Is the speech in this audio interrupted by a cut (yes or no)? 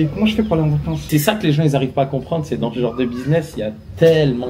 yes